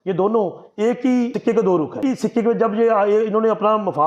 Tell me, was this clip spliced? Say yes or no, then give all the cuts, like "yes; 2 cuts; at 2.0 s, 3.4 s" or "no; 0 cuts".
yes; 2 cuts; at 1.3 s, 2.0 s